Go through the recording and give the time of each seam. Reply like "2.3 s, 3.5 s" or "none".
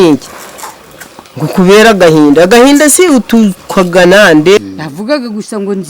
4.6 s